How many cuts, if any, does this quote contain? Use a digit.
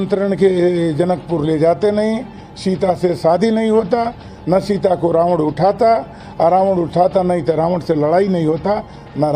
0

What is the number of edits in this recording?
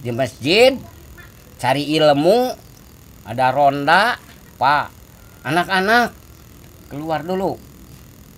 0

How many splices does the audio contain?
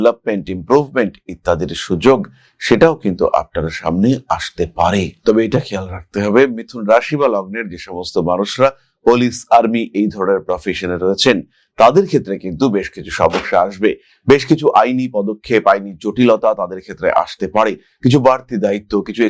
0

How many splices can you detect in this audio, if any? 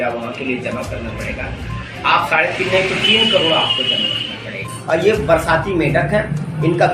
1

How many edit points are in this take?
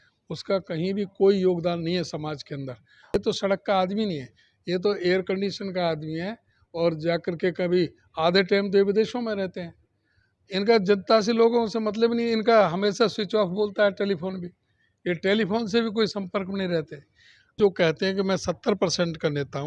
2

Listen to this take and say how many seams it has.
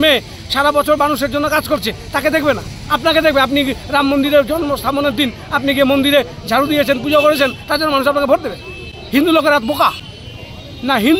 1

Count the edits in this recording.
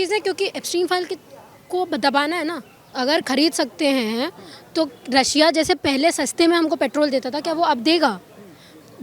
1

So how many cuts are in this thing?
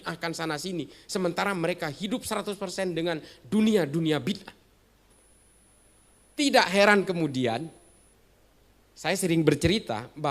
1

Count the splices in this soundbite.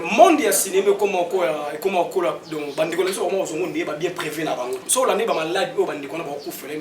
1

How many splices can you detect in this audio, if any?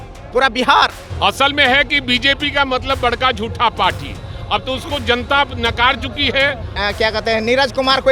2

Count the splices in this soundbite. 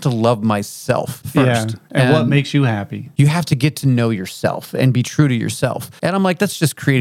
3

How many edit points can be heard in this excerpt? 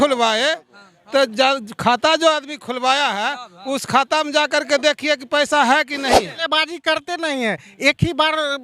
1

